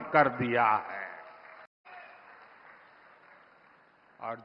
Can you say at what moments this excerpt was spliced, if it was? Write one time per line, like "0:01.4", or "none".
0:01.9